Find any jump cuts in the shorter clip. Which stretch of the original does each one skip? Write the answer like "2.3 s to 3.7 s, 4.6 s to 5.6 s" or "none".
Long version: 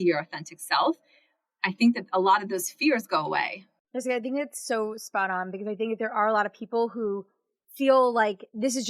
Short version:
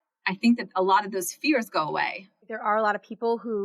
3.9 s to 6.0 s